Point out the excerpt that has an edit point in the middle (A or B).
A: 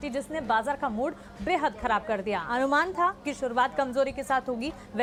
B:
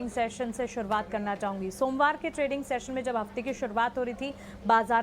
B